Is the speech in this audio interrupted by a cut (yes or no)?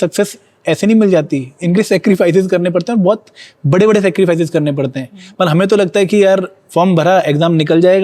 no